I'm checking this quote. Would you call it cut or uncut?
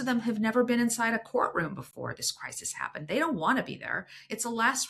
uncut